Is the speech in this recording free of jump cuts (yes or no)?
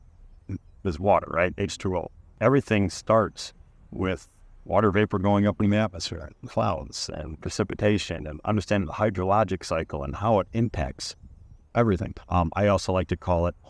no